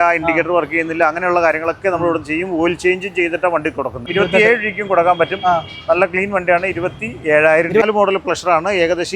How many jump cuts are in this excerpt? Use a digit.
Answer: 2